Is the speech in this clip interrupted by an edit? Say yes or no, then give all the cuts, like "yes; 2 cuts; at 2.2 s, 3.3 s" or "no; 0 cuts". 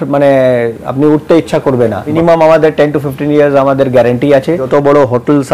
yes; 2 cuts; at 2.1 s, 4.6 s